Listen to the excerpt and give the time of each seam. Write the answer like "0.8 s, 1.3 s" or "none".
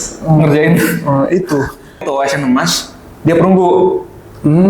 2.0 s